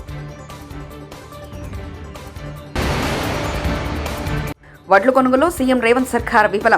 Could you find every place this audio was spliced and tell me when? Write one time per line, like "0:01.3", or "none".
0:02.7
0:04.7

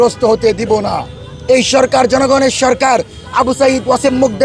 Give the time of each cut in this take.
none

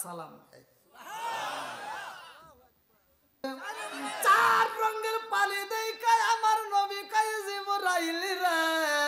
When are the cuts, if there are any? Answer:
0:03.4

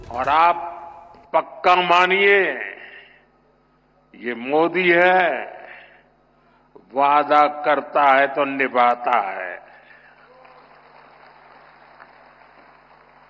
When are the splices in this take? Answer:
none

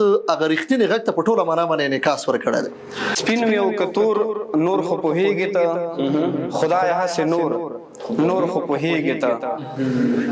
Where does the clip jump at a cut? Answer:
0:03.1

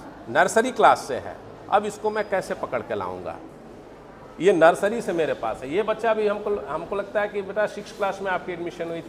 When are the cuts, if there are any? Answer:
none

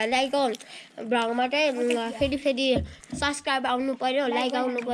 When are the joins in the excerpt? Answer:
none

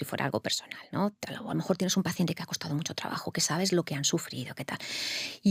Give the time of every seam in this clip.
none

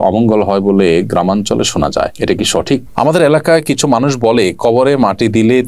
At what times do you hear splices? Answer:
0:02.9

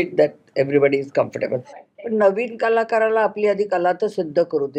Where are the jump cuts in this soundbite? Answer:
0:01.8

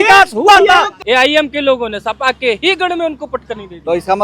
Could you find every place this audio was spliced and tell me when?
0:00.9

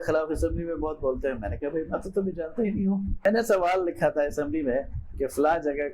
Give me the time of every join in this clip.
0:03.2

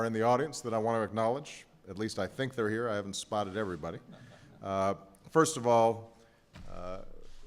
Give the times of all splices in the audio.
0:01.0

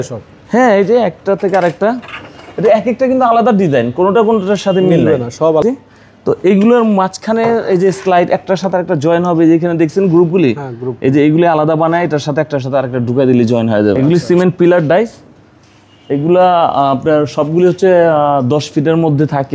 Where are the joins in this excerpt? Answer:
0:05.6
0:14.0

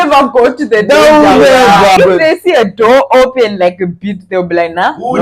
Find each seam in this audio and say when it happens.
0:02.0

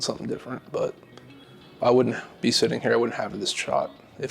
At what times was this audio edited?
0:01.7

